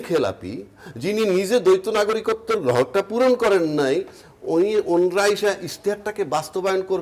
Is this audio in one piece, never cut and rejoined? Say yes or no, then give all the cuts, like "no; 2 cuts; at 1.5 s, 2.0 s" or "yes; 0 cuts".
yes; 0 cuts